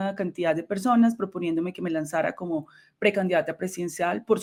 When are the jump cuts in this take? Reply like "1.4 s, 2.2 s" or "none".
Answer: none